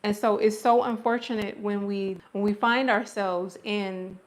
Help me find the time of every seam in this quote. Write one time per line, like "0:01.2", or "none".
0:02.2

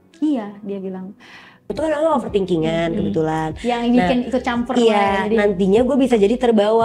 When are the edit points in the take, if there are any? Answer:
0:01.8

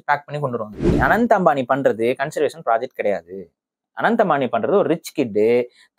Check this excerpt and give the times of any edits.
0:01.0

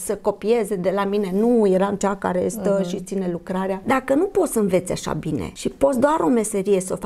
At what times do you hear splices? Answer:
0:03.8
0:05.5

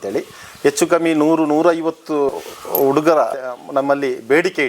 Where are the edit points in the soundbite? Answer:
0:02.3
0:03.4

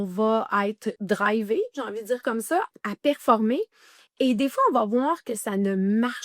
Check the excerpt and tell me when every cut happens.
0:01.0
0:02.7

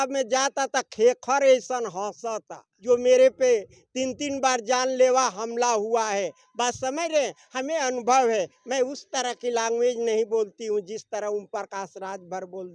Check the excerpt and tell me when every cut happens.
0:02.7

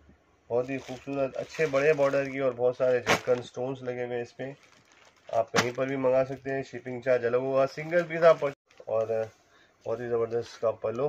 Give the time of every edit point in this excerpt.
0:08.6

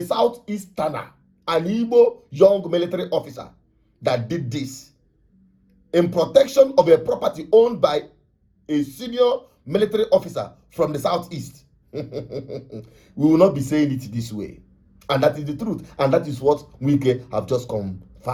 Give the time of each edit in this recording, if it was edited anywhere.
none

